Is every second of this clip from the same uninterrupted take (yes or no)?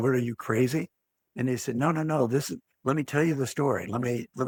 yes